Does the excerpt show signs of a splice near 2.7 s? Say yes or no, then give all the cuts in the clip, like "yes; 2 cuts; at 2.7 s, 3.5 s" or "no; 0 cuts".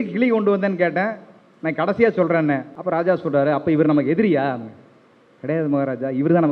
yes; 1 cut; at 2.7 s